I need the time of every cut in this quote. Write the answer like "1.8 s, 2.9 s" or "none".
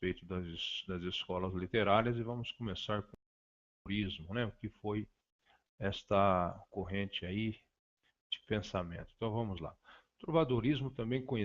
0.9 s

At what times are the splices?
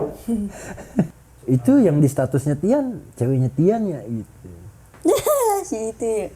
1.1 s

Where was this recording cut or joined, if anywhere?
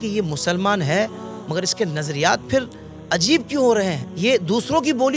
4.0 s

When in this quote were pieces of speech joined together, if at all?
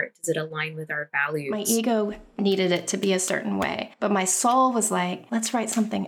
1.6 s, 3.8 s, 5.2 s

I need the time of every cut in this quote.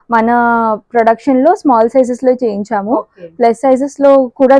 none

